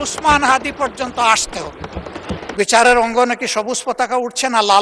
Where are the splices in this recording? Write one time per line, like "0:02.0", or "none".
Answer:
0:02.5